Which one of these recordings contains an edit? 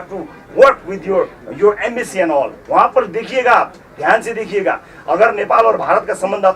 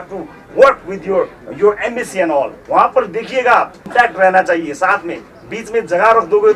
second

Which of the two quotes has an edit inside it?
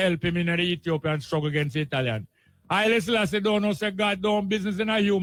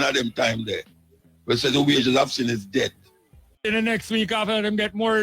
second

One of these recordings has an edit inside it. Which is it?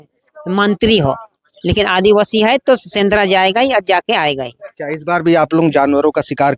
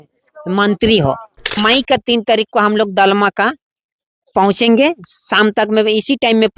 second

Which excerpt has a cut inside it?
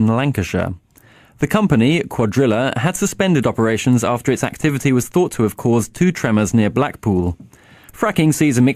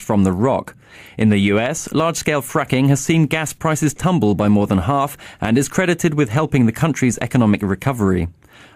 second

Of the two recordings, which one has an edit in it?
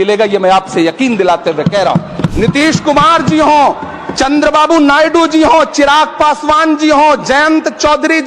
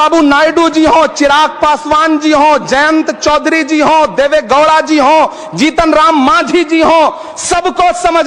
first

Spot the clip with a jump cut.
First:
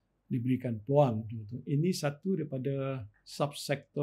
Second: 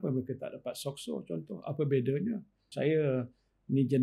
second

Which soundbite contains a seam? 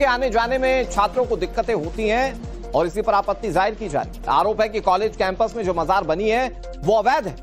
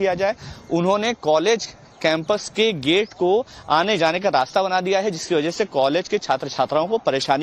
first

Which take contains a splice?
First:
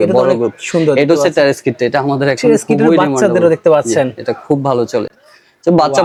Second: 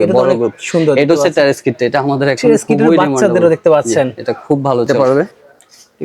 second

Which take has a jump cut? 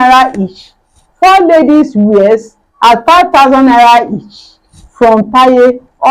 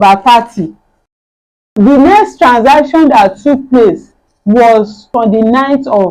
second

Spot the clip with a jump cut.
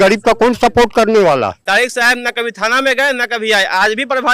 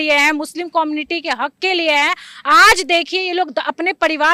first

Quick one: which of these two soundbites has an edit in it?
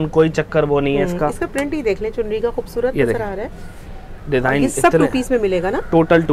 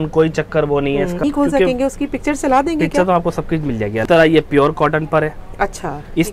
second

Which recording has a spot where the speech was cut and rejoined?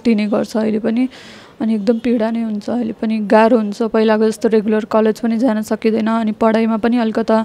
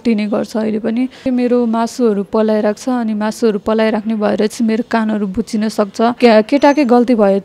second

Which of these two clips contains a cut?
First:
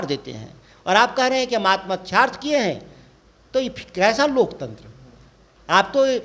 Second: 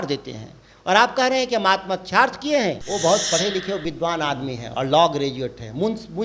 second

